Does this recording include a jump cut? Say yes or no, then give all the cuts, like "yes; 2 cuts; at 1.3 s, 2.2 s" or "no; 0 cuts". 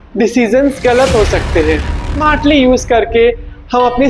yes; 1 cut; at 2.2 s